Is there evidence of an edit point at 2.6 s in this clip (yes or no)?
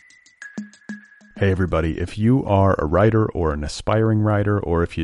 no